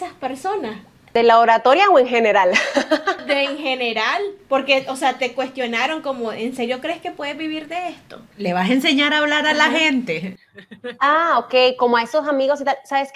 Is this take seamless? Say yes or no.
yes